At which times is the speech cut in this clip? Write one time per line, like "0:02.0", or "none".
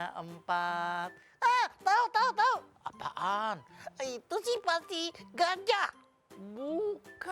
none

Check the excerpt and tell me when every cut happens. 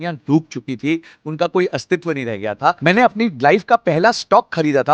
0:02.8

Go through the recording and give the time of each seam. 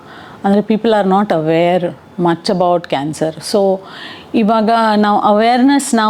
none

